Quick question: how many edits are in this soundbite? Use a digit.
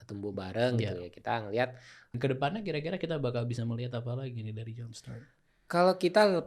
1